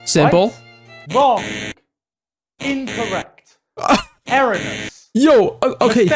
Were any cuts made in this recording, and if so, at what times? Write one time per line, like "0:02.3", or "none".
none